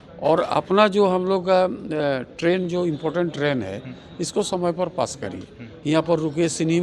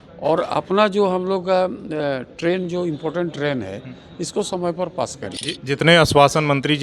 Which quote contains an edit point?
second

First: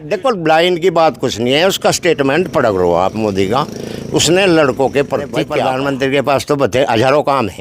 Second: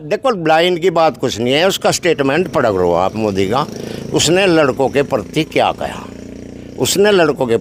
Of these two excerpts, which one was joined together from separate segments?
first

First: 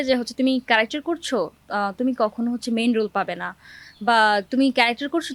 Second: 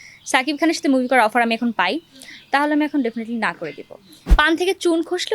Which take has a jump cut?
second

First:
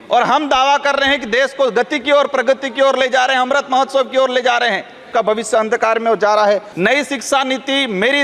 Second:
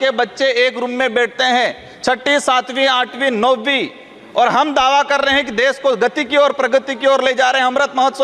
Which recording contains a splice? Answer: first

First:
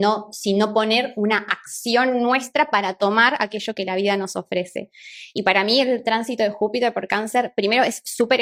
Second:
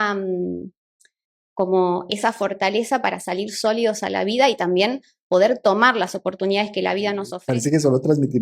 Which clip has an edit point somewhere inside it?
second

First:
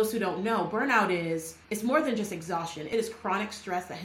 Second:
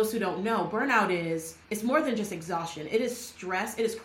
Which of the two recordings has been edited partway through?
first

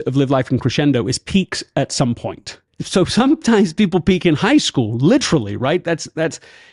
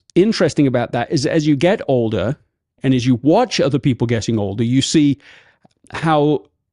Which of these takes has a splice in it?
first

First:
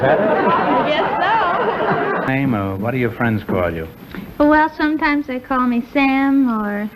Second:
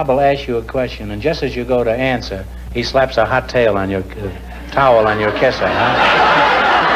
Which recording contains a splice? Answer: first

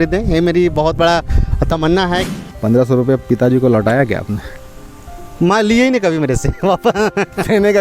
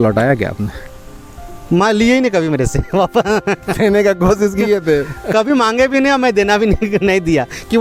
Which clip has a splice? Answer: first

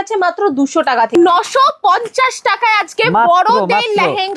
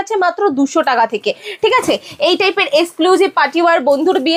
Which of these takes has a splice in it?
first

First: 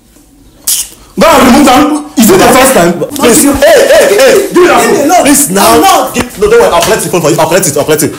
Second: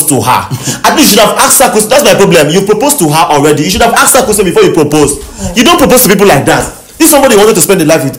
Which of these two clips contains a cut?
first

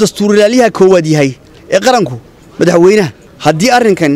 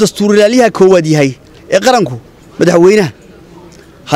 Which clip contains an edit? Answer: first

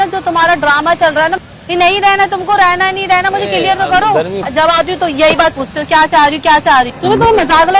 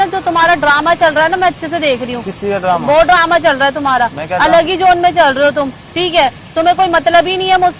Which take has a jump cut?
first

